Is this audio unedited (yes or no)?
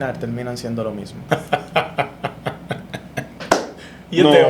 no